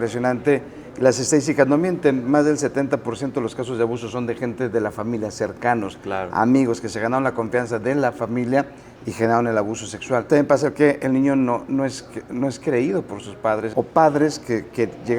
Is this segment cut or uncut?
cut